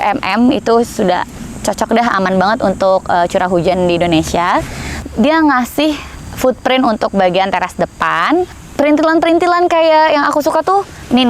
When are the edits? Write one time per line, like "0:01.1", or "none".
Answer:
0:04.9
0:06.1
0:08.6